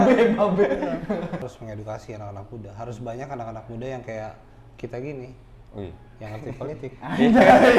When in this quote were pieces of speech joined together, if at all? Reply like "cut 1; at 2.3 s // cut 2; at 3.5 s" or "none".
cut 1; at 1.4 s